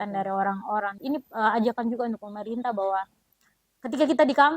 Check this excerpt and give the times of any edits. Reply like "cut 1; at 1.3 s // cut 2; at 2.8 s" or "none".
cut 1; at 1.0 s

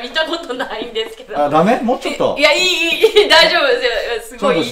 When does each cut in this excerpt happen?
none

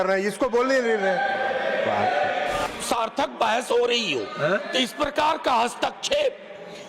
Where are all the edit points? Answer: cut 1; at 2.7 s

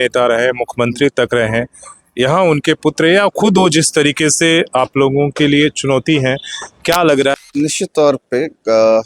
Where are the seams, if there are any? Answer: cut 1; at 7.3 s

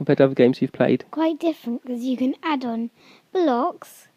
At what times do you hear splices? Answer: cut 1; at 1.1 s

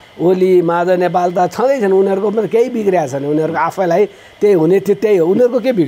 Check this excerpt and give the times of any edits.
none

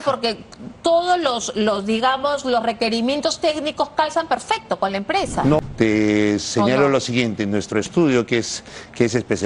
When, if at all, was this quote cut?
cut 1; at 5.7 s

